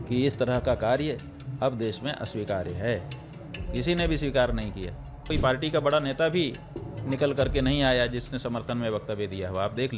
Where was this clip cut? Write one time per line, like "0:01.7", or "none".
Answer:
0:05.2